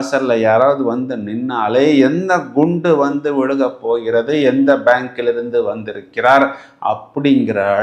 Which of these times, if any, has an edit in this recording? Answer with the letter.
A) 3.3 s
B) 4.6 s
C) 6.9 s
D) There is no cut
D